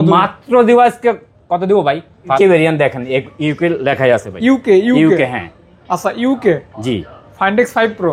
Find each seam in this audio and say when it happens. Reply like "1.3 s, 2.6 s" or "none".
2.4 s